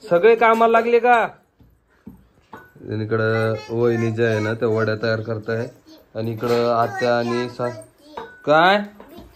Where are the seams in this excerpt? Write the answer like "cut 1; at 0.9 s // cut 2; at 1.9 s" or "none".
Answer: none